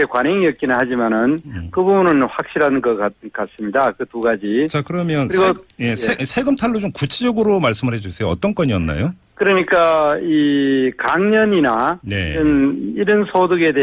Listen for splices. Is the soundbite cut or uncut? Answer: uncut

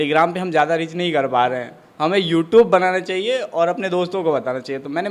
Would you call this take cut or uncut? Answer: uncut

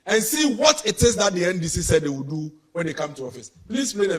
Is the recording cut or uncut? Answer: uncut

